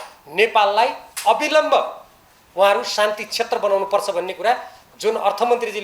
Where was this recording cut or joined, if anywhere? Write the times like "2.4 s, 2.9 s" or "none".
none